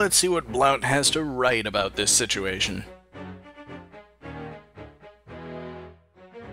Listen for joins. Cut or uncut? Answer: uncut